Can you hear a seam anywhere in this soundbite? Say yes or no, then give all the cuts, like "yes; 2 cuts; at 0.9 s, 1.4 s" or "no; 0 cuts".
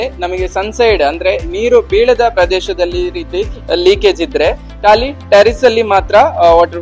no; 0 cuts